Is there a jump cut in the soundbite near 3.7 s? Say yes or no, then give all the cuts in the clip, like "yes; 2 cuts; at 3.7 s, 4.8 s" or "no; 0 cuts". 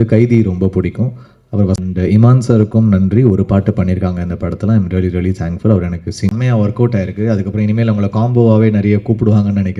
no; 2 cuts; at 1.8 s, 6.3 s